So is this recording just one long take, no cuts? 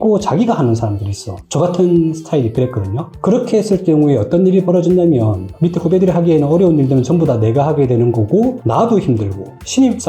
no; 1 cut; at 5.5 s

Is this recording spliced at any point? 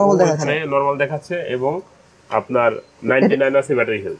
no; 0 cuts

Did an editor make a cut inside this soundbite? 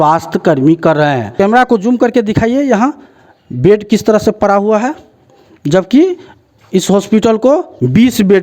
yes; 1 cut; at 1.3 s

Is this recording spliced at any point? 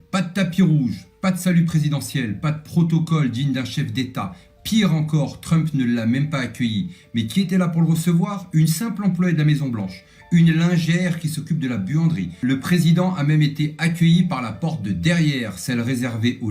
yes; 1 cut; at 12.4 s

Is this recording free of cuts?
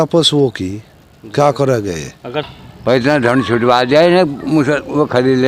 no; 1 cut; at 2.6 s

